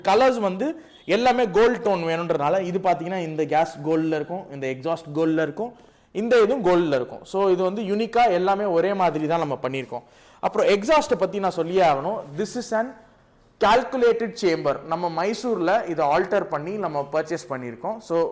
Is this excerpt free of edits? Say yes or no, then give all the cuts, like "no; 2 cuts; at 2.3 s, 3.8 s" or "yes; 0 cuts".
yes; 0 cuts